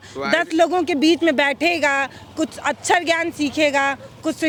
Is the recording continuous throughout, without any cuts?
yes; 0 cuts

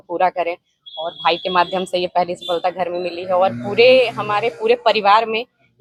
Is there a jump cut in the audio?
no; 0 cuts

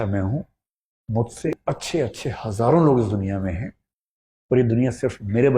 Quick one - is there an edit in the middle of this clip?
yes; 1 cut; at 1.5 s

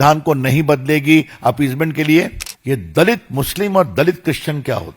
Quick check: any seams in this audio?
yes; 1 cut; at 2.5 s

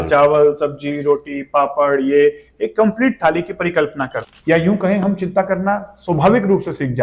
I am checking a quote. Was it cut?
yes; 1 cut; at 4.2 s

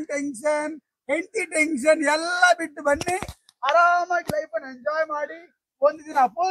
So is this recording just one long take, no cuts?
yes; 0 cuts

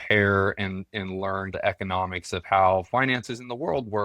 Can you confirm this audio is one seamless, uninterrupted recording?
no; 1 cut; at 1.5 s

